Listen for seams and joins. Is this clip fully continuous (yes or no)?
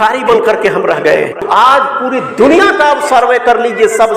no